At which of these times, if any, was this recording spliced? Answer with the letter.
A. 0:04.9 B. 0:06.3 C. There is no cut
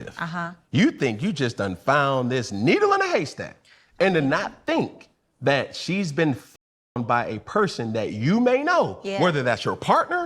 C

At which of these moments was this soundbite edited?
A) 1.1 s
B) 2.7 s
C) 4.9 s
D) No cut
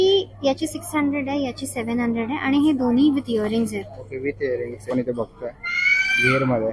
C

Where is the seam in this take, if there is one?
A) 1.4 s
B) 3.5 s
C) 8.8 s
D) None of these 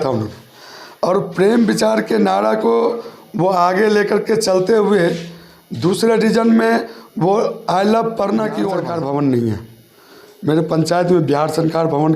C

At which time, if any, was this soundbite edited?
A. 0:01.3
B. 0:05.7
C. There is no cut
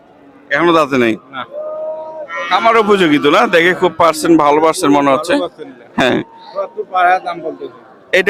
C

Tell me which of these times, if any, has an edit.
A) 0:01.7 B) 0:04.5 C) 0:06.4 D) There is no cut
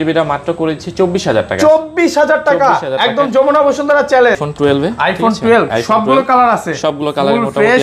B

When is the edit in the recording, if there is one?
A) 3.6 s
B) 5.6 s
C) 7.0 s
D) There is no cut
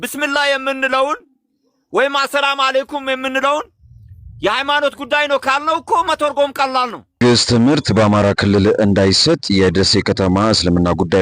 C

